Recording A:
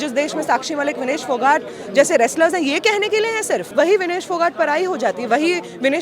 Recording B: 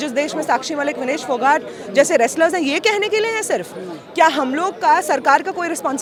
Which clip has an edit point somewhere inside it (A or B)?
A